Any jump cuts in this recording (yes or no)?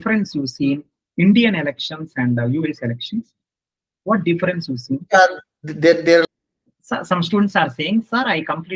yes